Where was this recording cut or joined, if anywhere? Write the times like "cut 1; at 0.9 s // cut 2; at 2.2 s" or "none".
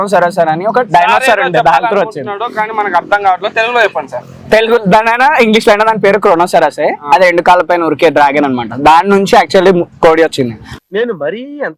none